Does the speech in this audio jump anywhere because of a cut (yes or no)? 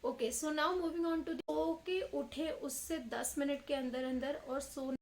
yes